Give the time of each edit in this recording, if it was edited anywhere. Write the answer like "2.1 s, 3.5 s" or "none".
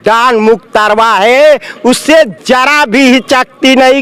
none